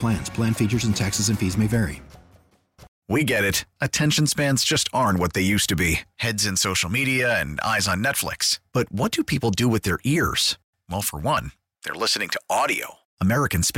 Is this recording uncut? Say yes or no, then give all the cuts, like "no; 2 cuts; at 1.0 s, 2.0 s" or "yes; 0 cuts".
no; 1 cut; at 3.0 s